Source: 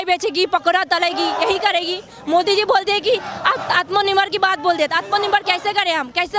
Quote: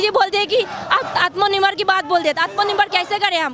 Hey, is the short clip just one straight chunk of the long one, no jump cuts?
yes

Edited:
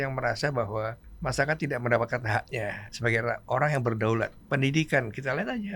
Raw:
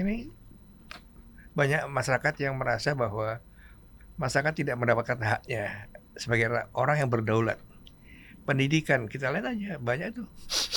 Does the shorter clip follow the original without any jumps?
no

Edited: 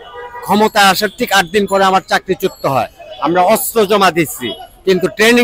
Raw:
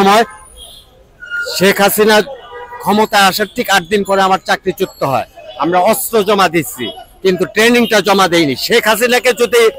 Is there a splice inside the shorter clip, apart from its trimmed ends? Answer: no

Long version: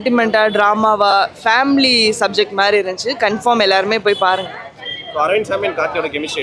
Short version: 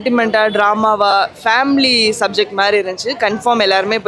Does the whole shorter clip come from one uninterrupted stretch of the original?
yes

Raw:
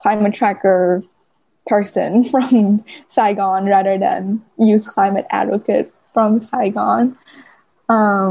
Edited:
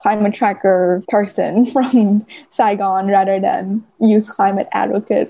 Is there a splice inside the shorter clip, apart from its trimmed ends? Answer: yes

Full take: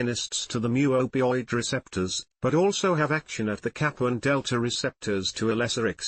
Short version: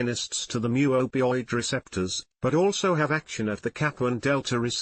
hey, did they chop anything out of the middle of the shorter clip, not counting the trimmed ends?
no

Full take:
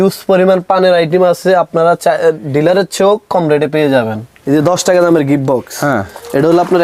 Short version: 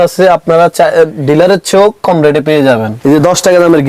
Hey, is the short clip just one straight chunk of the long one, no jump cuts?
no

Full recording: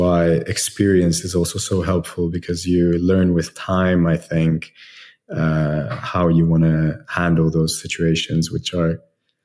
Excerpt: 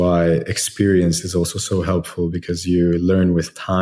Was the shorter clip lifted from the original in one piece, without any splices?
yes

